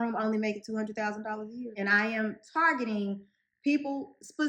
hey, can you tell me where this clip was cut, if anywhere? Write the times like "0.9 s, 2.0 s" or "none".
1.7 s